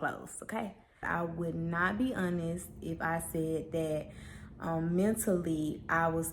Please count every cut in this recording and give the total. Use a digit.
1